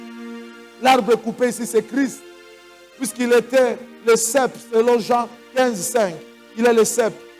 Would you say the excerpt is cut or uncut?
uncut